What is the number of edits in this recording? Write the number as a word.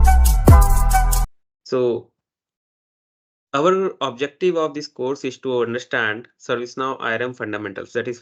one